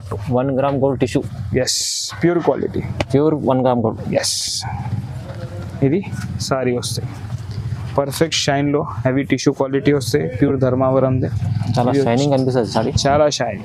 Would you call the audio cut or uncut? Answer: uncut